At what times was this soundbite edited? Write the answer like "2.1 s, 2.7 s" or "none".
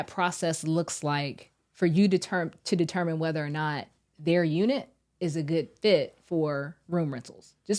none